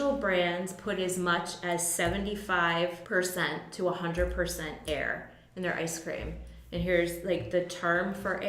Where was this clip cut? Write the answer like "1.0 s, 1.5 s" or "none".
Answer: 3.0 s